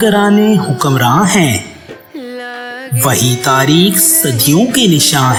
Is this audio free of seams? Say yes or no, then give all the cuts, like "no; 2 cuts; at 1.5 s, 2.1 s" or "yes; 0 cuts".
yes; 0 cuts